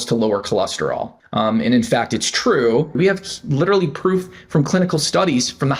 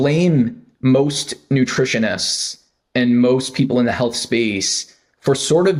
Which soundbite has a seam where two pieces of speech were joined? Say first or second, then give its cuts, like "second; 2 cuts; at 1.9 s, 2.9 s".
first; 2 cuts; at 1.1 s, 2.9 s